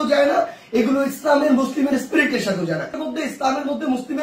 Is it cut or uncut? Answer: cut